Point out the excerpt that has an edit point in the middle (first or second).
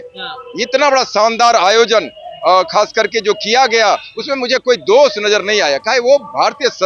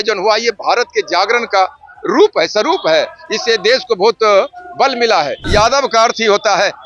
second